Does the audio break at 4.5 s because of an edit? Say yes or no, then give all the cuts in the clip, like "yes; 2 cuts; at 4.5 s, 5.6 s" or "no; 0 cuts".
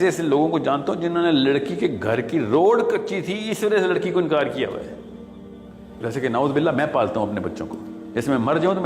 no; 1 cut; at 6.0 s